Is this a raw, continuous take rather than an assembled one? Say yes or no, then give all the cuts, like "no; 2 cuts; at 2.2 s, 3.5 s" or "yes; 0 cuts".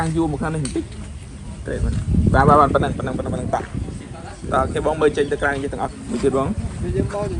yes; 0 cuts